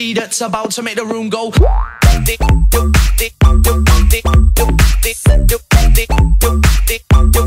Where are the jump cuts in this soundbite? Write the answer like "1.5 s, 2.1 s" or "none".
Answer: none

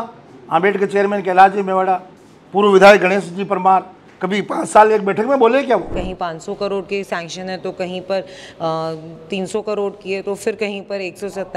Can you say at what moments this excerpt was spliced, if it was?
5.9 s

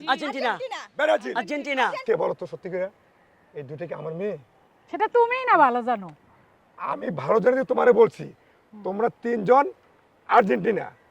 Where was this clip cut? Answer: 2.0 s

